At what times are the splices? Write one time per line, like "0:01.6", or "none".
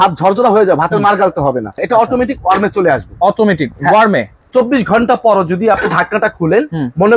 0:01.8
0:04.4